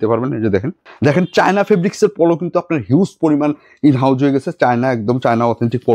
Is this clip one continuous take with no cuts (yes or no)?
yes